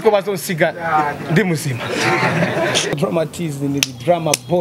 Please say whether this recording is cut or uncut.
cut